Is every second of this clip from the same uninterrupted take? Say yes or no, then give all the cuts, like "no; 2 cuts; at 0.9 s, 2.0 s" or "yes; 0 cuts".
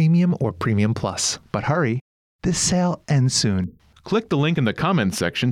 no; 1 cut; at 1.3 s